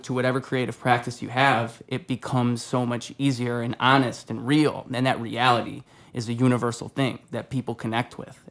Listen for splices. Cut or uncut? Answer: uncut